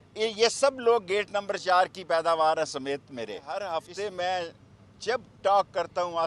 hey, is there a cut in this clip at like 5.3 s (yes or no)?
no